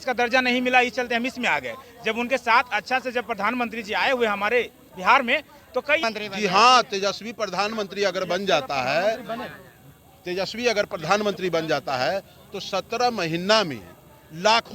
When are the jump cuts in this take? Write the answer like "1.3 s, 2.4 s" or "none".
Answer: 6.0 s

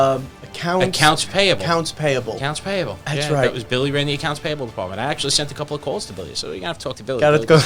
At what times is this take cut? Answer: none

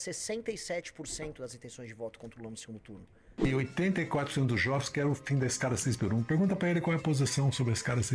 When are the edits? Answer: 3.5 s

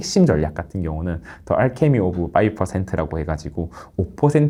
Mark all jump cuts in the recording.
none

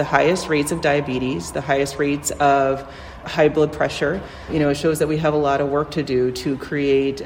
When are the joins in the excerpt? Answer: 3.2 s, 4.5 s

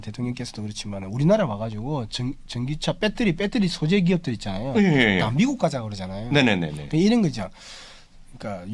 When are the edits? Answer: none

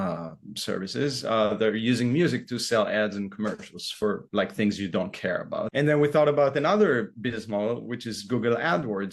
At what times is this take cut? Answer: 5.7 s

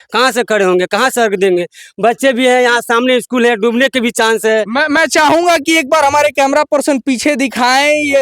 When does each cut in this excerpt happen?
none

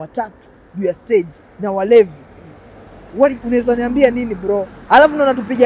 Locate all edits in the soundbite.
4.7 s

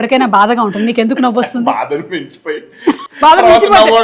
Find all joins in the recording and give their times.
3.1 s

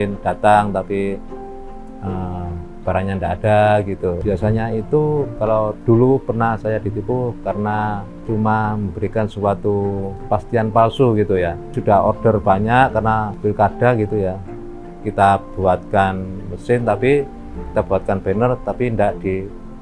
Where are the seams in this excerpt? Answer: 4.2 s, 11.7 s, 13.3 s

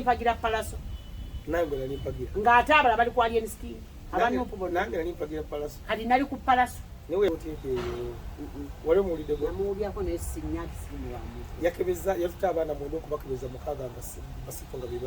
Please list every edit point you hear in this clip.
7.3 s

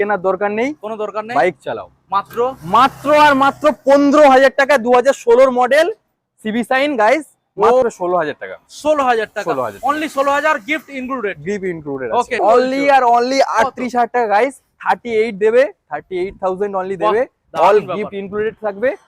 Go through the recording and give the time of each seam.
7.8 s, 12.4 s

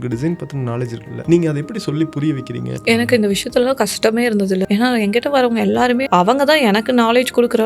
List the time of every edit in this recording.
1.1 s, 2.7 s, 4.6 s, 6.1 s

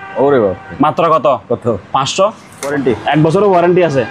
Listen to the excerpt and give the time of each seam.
2.6 s

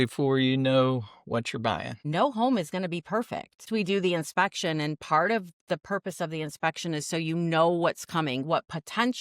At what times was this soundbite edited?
1.9 s, 3.6 s

